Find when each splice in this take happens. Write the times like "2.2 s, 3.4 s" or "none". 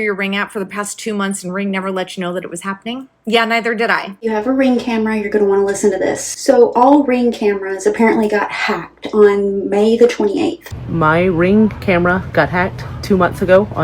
4.2 s, 10.7 s

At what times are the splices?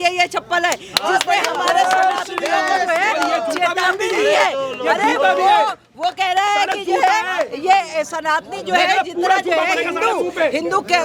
none

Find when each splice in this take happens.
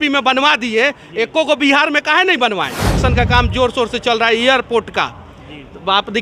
3.0 s

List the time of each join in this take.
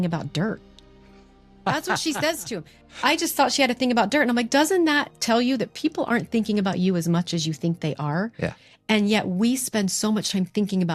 none

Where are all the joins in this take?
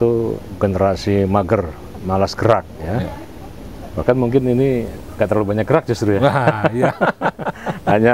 none

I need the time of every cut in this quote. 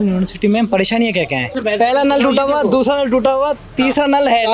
1.5 s

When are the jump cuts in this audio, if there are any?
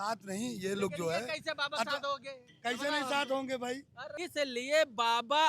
4.2 s

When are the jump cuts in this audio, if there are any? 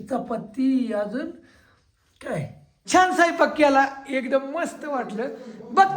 2.7 s

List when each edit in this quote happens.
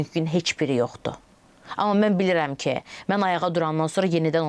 none

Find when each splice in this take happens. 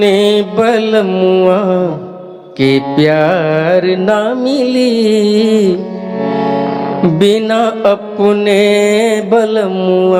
none

